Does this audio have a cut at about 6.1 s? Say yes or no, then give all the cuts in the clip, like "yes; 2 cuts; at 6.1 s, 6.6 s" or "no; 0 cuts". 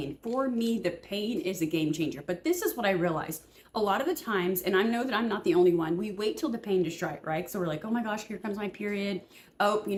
no; 0 cuts